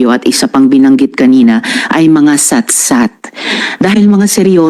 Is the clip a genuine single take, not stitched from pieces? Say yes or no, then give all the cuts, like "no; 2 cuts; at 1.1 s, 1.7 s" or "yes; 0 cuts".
yes; 0 cuts